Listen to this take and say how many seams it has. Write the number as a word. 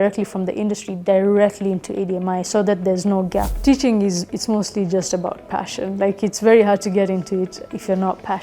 one